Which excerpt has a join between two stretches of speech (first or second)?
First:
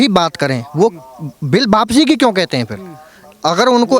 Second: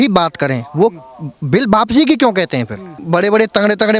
second